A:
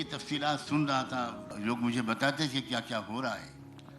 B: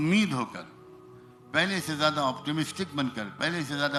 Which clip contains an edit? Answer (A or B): A